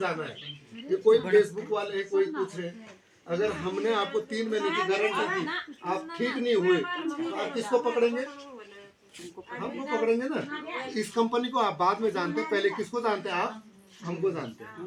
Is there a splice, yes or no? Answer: no